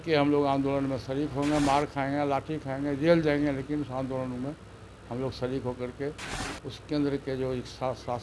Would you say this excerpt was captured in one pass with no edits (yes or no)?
yes